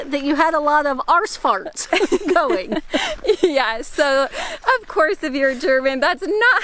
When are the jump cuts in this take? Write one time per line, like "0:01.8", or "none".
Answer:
none